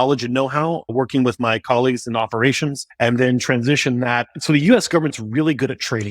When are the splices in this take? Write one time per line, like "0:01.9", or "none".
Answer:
0:00.9
0:02.8
0:04.3

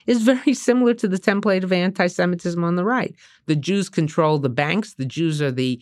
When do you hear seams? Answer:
none

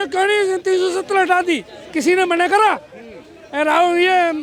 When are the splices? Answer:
none

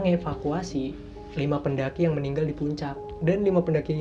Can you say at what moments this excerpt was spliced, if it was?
none

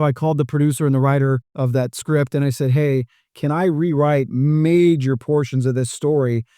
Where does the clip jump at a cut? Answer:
0:01.5

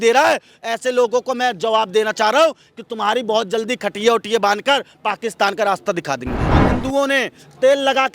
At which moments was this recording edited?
0:06.4

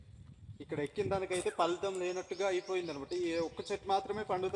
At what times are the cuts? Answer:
none

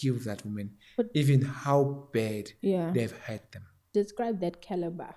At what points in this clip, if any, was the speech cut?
0:03.8

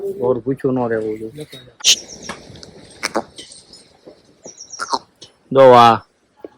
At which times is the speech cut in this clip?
0:01.8

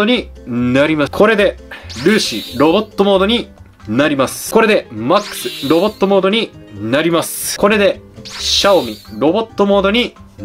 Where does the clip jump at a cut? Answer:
0:01.1
0:04.4
0:07.4

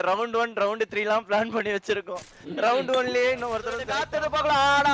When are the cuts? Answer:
0:03.8

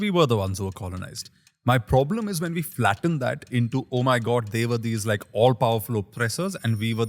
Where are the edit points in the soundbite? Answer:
none

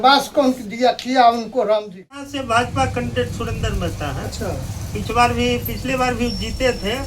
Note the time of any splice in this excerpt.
0:02.3

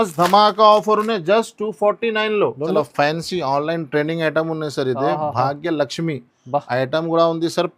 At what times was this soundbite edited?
0:02.7

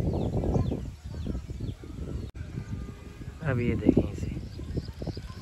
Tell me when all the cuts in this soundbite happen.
0:02.4

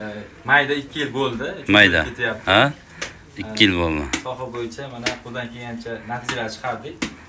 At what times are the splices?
none

